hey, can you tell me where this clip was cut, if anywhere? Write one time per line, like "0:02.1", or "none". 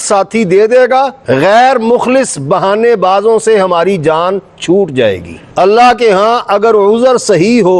0:05.4